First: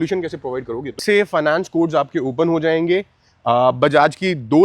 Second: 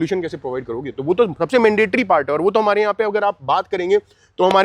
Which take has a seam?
first; 1 cut; at 1.0 s

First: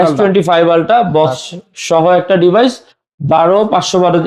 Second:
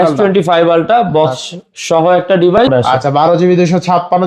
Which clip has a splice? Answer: second; 1 cut; at 2.6 s

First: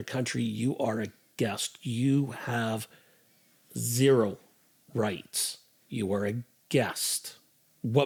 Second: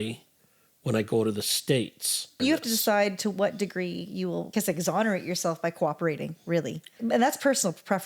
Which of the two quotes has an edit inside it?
second; 3 cuts; at 2.4 s, 4.5 s, 6.9 s

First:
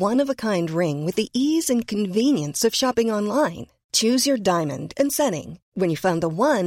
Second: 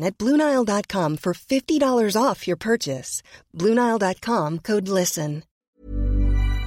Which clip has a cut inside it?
second; 1 cut; at 5.7 s

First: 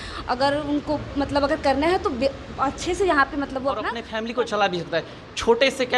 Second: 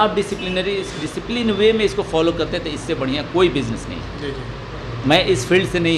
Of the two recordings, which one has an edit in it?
first; 1 cut; at 4.0 s

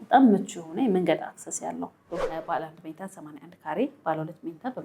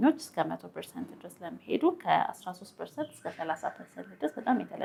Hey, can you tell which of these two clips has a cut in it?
first; 1 cut; at 2.3 s

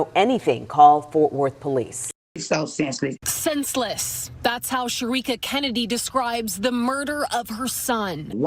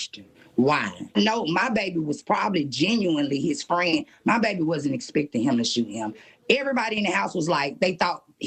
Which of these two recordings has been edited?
first; 1 cut; at 2.4 s

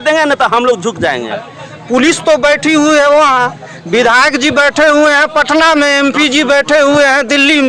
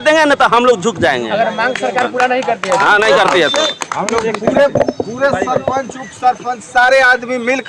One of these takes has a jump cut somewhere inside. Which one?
first; 1 cut; at 1.4 s

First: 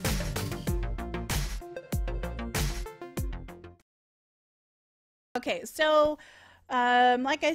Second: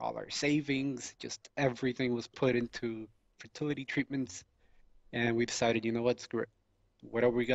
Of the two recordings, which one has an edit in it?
second; 1 cut; at 2.5 s

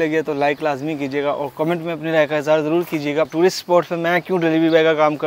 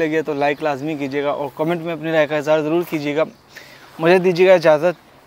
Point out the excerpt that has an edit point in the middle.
first; 1 cut; at 3.3 s

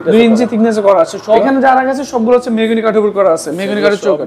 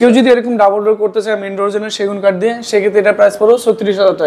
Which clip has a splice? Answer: first; 1 cut; at 1.4 s

